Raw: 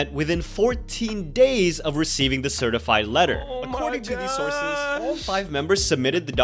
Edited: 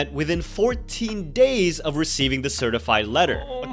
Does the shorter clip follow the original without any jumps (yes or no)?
yes